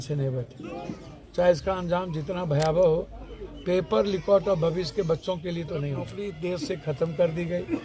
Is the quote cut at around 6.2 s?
yes; 1 cut; at 6.2 s

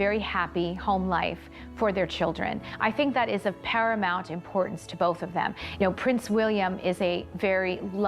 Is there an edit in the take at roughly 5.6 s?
yes; 1 cut; at 5.6 s

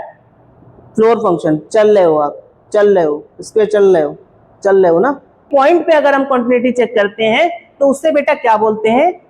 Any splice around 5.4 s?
yes; 1 cut; at 5.4 s

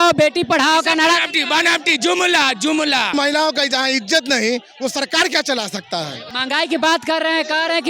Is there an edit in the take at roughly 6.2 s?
yes; 2 cuts; at 3.1 s, 6.2 s

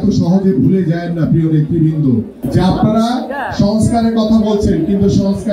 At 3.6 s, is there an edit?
no; 1 cut; at 2.4 s

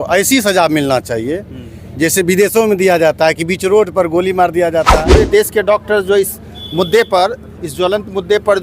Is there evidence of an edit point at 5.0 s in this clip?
yes; 1 cut; at 5.0 s

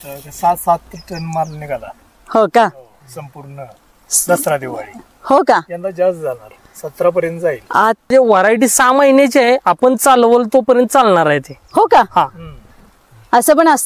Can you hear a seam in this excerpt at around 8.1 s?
yes; 1 cut; at 8.1 s

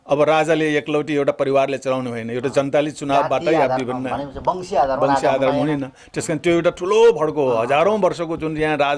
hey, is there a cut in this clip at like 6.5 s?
no; 0 cuts

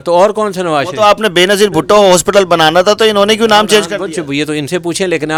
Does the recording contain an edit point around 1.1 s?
no; 0 cuts

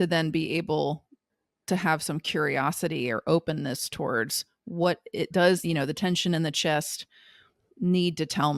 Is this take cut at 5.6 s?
yes; 1 cut; at 5.6 s

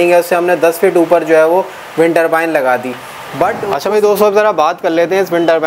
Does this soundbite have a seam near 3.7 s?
yes; 1 cut; at 3.7 s

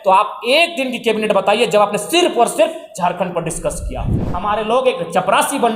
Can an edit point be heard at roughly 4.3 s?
yes; 1 cut; at 4.3 s

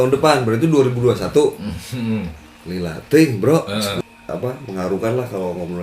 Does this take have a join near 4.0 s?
yes; 1 cut; at 4.0 s

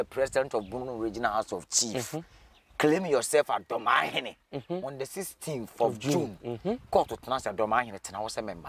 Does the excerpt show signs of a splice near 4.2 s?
no; 0 cuts

